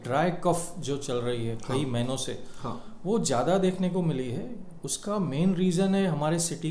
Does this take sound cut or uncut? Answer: uncut